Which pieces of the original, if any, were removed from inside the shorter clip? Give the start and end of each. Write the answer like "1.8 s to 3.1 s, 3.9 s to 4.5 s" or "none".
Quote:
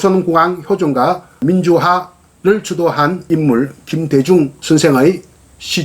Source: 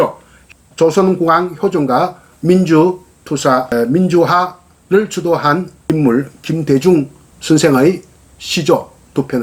2.3 s to 3.9 s, 5.7 s to 5.8 s, 7.1 s to 7.4 s